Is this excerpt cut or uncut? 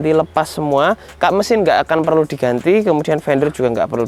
uncut